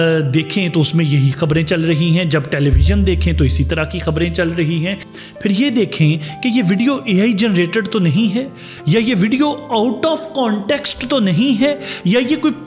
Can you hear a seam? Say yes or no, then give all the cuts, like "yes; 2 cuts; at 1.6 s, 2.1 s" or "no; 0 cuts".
yes; 1 cut; at 5.1 s